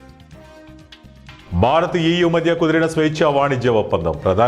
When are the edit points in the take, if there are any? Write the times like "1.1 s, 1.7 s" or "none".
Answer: 1.5 s